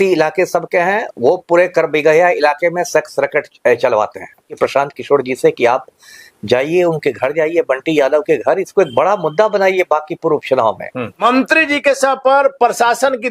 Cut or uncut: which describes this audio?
cut